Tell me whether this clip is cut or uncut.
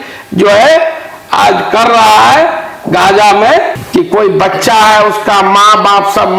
cut